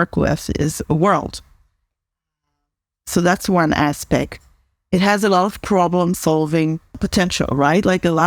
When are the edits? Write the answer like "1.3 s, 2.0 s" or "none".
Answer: 7.0 s